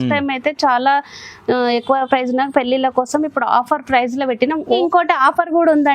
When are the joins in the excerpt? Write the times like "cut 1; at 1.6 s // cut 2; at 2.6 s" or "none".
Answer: cut 1; at 4.8 s